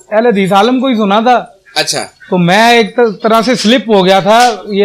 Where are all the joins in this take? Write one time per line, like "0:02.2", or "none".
none